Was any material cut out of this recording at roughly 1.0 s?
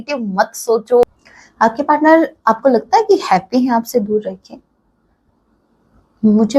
yes; 1 cut; at 1.0 s

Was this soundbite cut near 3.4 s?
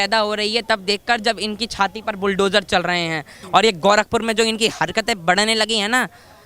yes; 1 cut; at 3.4 s

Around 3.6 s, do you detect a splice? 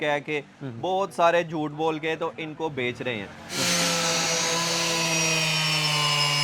yes; 1 cut; at 3.6 s

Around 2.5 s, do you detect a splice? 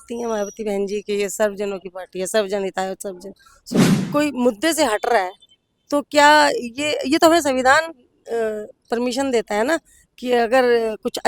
no; 1 cut; at 3.9 s

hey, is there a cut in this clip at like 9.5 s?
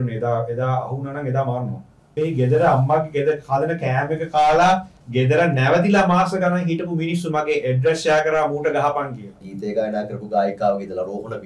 yes; 2 cuts; at 1.9 s, 9.5 s

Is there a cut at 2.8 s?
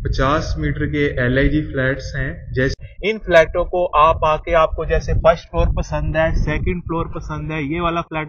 yes; 1 cut; at 2.8 s

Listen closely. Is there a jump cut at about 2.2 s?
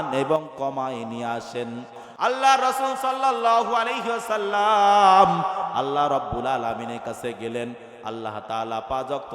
yes; 1 cut; at 2.2 s

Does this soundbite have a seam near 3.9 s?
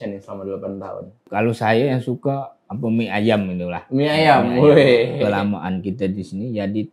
no; 2 cuts; at 1.3 s, 5.2 s

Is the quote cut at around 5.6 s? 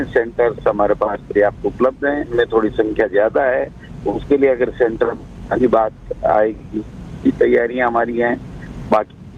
no; 1 cut; at 2.3 s

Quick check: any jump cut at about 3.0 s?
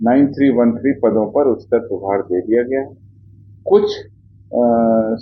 no; 0 cuts

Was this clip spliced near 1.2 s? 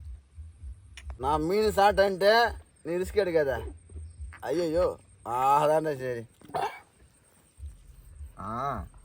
yes; 1 cut; at 1.2 s

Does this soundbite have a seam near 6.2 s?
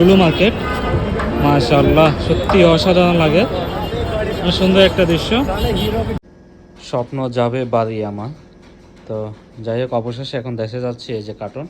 yes; 1 cut; at 6.2 s

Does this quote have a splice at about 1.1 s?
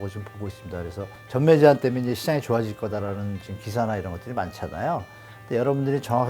yes; 1 cut; at 1.1 s

